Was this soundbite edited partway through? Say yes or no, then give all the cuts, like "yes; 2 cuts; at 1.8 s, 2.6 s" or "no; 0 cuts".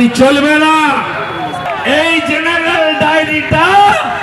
yes; 1 cut; at 1.6 s